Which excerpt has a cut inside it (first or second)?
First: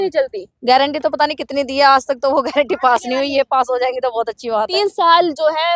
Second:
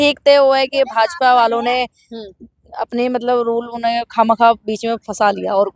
first